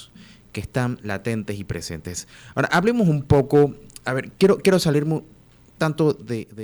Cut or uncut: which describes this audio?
uncut